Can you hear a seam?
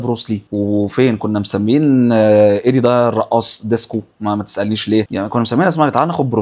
no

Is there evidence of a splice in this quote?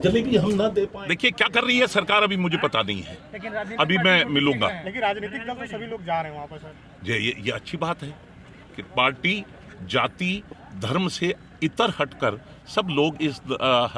yes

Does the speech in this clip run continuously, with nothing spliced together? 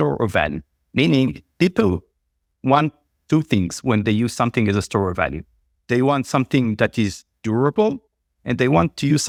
yes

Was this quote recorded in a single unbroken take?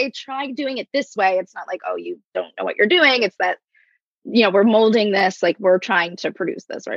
yes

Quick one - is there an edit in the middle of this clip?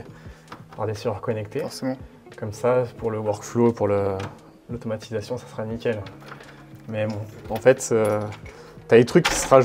no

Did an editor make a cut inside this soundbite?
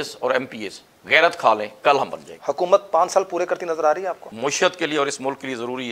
yes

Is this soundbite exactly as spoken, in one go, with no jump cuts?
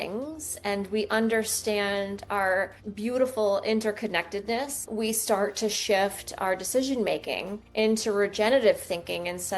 no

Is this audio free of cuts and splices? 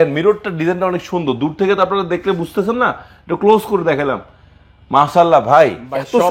yes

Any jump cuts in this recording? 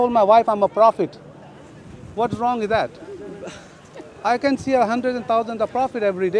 no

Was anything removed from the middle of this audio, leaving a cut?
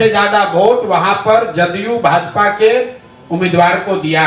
no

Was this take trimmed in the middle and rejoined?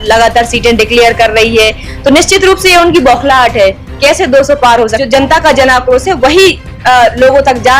yes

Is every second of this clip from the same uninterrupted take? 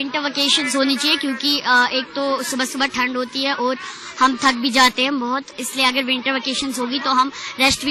yes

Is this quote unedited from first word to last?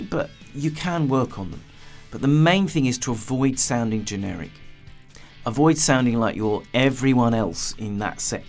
yes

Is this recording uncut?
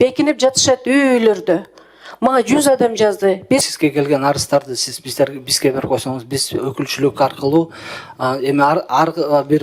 no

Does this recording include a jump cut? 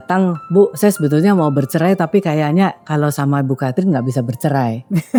no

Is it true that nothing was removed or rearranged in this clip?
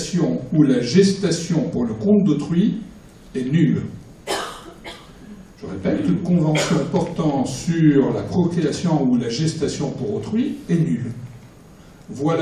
yes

